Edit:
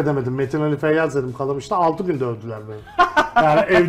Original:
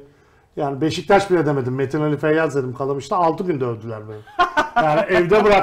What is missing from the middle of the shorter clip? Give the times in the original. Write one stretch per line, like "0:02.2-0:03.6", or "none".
none